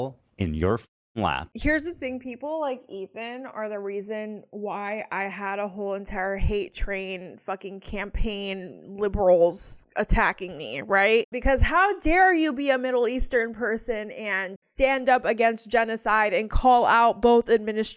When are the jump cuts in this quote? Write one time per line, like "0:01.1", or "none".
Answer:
none